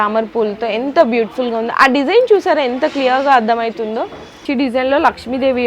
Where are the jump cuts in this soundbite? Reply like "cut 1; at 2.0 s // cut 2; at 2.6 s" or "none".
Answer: cut 1; at 4.4 s